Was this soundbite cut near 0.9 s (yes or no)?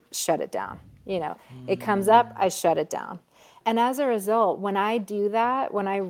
no